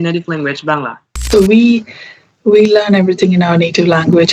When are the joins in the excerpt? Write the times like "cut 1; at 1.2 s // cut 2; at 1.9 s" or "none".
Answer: cut 1; at 1.2 s

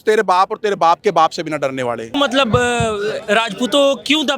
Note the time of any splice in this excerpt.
cut 1; at 2.1 s

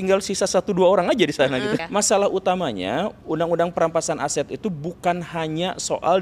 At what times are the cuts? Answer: cut 1; at 1.8 s

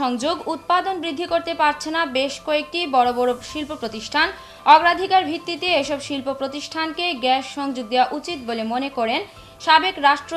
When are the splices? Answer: none

